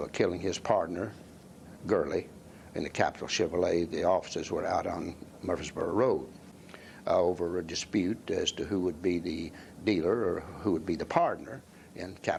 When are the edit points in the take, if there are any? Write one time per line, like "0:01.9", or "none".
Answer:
none